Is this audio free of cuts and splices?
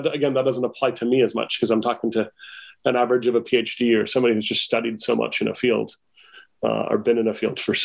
yes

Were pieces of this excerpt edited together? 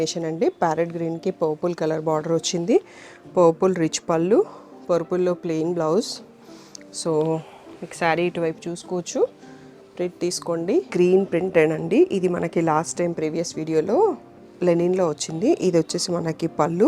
yes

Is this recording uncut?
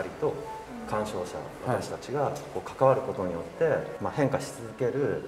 no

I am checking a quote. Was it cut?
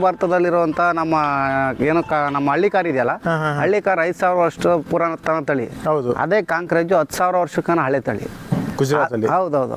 no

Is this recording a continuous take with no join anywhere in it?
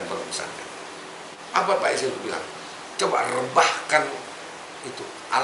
no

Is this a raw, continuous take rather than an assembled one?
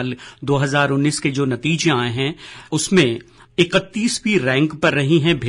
no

